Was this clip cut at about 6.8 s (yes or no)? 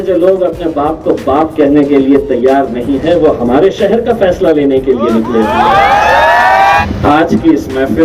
yes